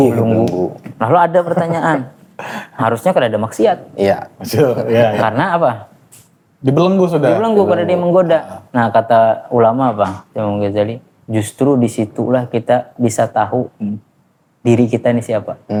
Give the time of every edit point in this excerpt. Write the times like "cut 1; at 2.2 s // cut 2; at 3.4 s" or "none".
none